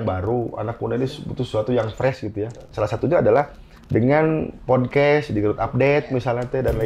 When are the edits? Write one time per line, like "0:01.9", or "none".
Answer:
0:02.7